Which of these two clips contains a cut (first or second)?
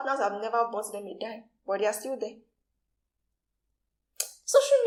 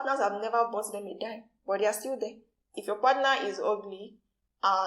second